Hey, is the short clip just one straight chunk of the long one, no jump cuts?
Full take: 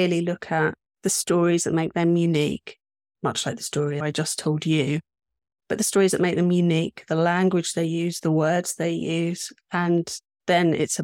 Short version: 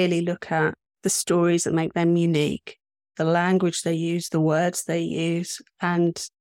no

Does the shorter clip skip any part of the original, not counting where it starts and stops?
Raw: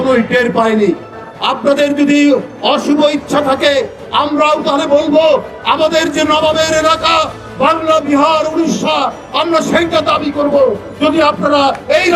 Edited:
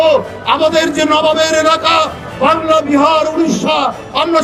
no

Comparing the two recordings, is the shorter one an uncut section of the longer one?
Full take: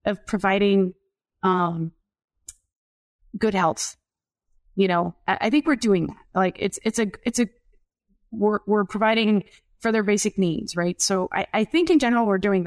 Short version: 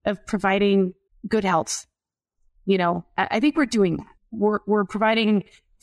no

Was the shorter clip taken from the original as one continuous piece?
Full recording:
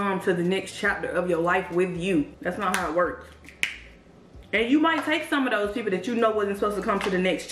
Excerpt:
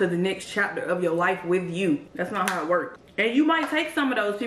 no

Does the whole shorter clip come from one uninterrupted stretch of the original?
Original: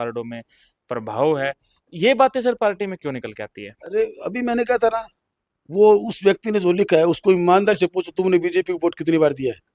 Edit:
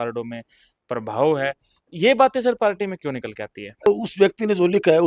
no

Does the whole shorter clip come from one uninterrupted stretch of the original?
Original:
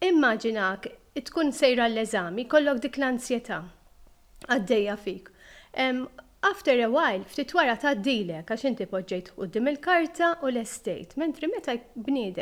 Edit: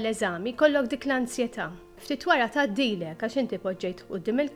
no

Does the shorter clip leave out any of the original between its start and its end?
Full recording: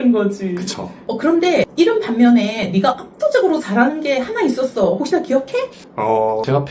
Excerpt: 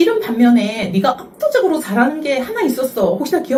no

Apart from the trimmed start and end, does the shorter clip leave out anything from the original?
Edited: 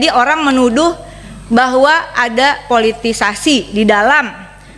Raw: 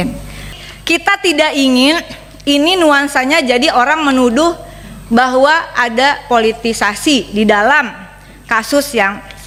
no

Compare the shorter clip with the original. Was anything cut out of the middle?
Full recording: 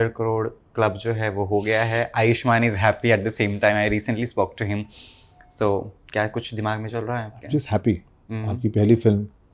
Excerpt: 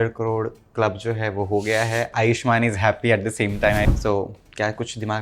yes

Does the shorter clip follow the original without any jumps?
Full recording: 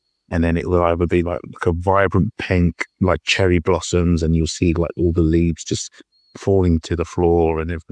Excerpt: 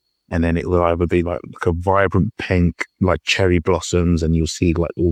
yes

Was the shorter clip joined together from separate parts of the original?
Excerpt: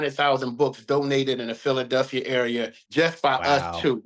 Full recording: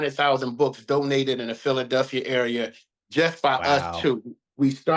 yes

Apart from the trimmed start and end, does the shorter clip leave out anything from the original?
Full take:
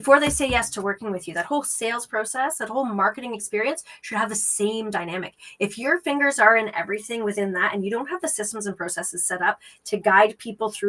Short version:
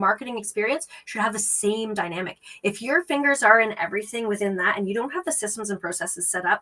no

